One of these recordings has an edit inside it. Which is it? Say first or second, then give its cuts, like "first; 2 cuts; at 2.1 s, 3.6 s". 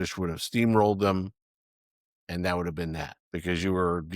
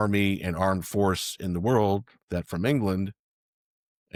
first; 1 cut; at 3.1 s